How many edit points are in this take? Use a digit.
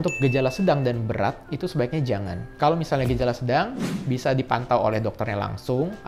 0